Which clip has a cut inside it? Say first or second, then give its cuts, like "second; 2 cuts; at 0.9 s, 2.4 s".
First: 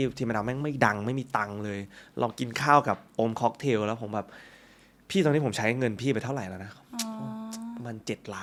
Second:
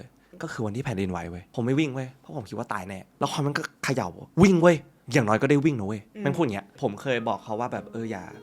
second; 4 cuts; at 1.4 s, 3.0 s, 4.9 s, 6.7 s